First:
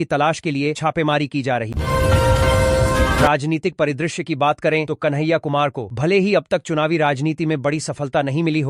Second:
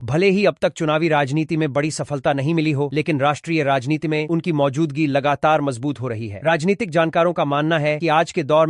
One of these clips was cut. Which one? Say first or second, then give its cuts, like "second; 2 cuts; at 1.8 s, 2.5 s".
first; 2 cuts; at 1.7 s, 3.2 s